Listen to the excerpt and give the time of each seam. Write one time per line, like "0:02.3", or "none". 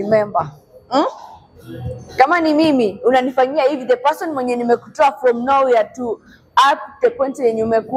none